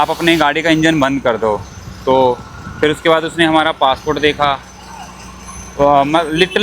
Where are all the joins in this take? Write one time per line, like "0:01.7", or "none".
none

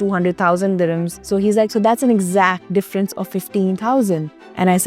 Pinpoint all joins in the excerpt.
0:01.1
0:02.6

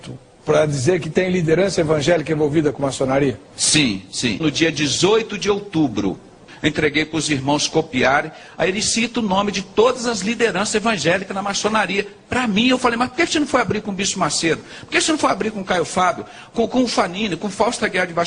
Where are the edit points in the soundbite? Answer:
0:06.5

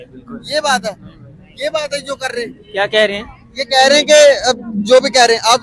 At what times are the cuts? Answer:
none

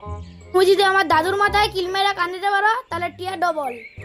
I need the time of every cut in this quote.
none

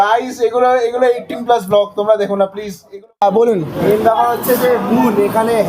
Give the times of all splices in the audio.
0:03.1

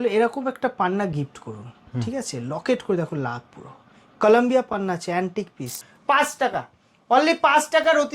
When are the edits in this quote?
0:05.8

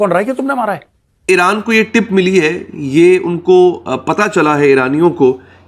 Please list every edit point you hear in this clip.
0:01.2

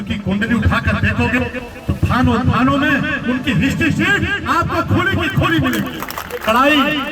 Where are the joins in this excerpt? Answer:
0:06.1

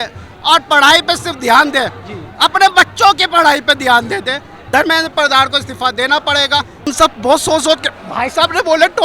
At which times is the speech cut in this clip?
0:04.6
0:06.9

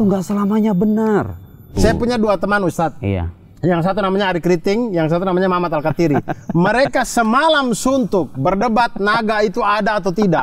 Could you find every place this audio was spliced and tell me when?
0:01.7

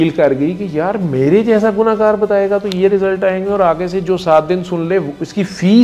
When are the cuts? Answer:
none

